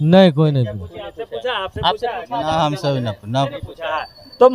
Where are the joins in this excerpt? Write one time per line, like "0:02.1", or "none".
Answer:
none